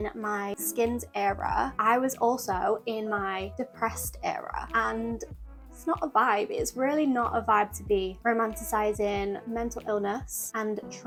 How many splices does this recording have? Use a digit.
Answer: 0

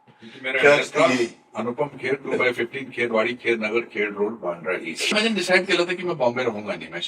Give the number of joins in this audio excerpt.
1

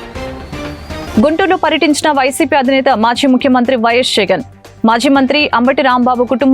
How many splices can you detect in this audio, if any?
1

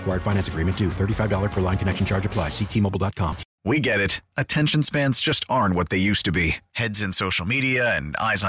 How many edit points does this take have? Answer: 1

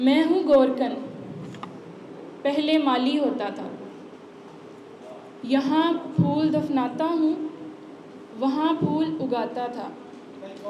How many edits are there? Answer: 0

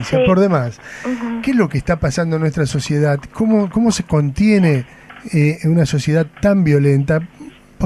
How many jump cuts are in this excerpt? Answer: 1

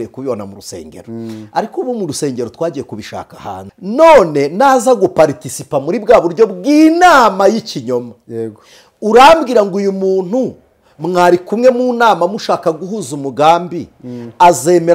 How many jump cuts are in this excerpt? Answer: 1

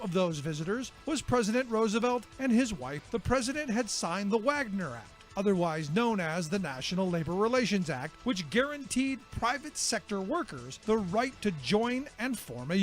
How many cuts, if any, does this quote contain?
1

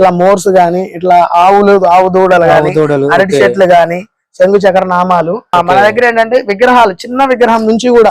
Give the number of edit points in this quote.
1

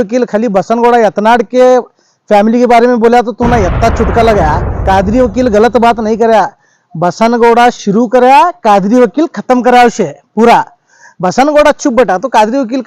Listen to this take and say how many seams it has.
1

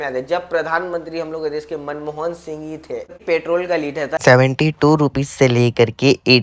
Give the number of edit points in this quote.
1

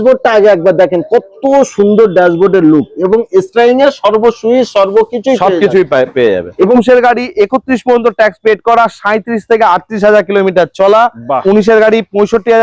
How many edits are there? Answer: 2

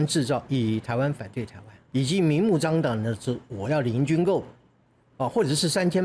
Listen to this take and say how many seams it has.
1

